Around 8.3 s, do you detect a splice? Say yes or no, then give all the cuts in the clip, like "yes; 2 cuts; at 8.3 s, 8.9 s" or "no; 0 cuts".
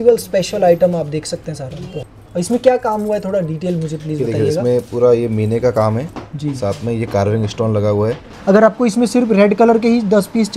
yes; 2 cuts; at 1.9 s, 8.3 s